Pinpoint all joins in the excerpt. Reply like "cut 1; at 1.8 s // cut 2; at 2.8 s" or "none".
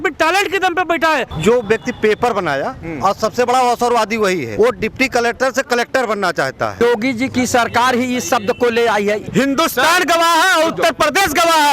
cut 1; at 1.3 s // cut 2; at 4.5 s // cut 3; at 6.8 s // cut 4; at 9.2 s